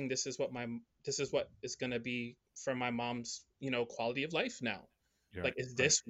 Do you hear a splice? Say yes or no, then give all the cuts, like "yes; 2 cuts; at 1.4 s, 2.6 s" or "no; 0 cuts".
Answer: no; 0 cuts